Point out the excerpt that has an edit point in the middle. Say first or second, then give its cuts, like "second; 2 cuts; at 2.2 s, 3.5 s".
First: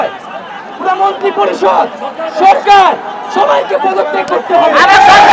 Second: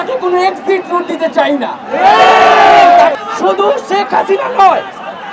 second; 1 cut; at 3.2 s